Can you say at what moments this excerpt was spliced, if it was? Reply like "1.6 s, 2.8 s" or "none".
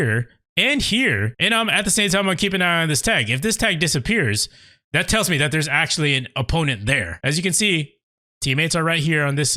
1.3 s, 7.1 s